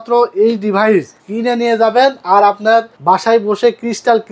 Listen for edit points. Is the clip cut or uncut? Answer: cut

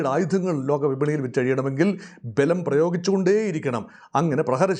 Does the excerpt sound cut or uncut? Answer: uncut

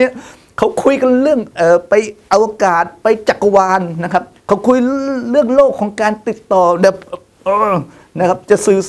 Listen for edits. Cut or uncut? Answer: cut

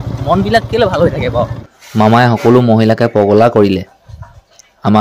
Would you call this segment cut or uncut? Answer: cut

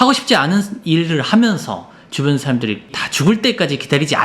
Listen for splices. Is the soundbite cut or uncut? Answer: cut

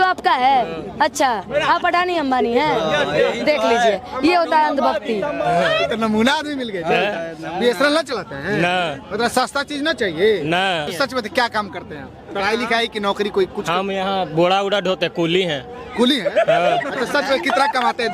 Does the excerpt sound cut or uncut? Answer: cut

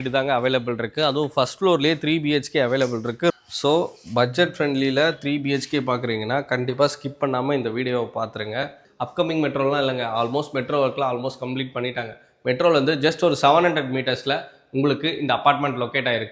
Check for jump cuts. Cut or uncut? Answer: cut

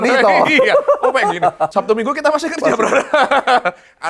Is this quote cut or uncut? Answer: cut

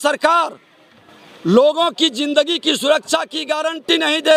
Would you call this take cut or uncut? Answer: uncut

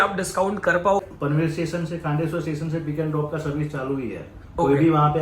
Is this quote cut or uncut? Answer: cut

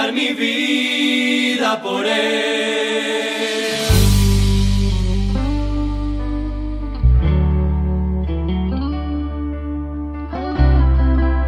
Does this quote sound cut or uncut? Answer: uncut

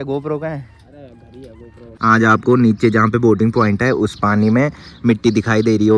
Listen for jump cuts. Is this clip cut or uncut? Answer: cut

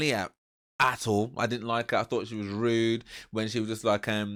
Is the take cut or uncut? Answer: uncut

